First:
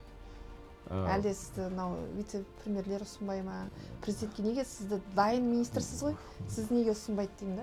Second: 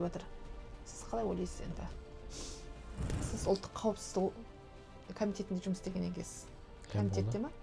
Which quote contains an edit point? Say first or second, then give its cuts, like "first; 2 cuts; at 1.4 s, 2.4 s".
second; 1 cut; at 3.3 s